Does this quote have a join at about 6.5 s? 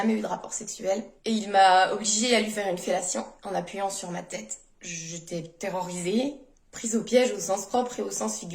no; 1 cut; at 4.7 s

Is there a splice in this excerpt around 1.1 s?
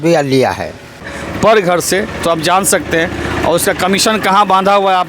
yes; 1 cut; at 1.1 s

